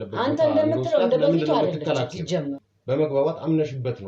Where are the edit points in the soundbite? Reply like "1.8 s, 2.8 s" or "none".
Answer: 2.7 s

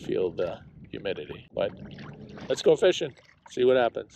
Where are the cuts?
1.4 s

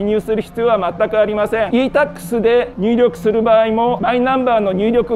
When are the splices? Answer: 1.7 s, 2.7 s, 4.0 s

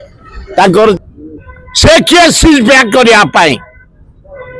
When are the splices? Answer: 0.9 s

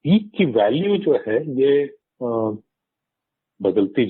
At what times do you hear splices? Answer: none

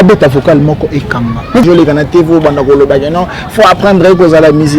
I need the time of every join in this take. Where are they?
1.6 s

